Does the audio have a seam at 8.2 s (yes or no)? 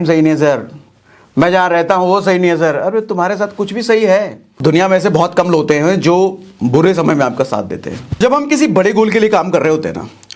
yes